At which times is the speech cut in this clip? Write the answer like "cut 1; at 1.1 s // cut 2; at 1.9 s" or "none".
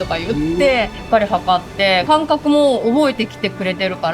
cut 1; at 1.0 s // cut 2; at 2.0 s